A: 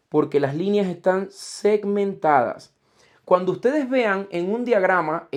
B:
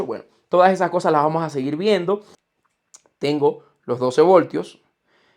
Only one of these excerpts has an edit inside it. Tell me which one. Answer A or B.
B